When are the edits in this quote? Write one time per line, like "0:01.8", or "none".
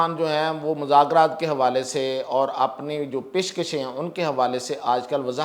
none